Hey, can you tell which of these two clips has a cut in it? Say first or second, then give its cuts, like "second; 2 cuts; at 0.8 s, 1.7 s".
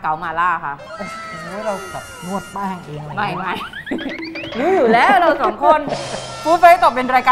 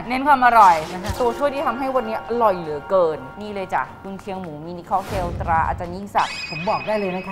second; 3 cuts; at 1.2 s, 3.3 s, 6.5 s